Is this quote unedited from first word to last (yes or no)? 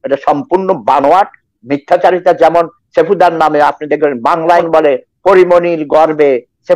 no